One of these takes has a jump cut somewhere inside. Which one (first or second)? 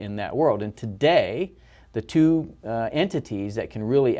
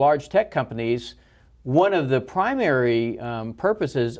second